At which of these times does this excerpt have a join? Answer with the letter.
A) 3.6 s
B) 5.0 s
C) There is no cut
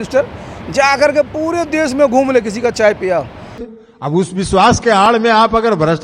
A